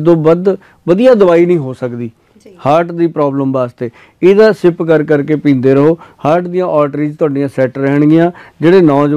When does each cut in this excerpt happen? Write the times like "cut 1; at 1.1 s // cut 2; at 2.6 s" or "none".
none